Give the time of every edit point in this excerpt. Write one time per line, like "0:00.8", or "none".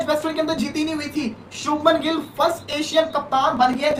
none